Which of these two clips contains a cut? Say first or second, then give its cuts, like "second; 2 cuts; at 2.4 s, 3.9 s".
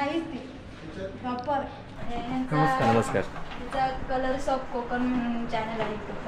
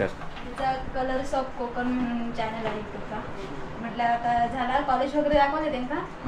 first; 1 cut; at 1.9 s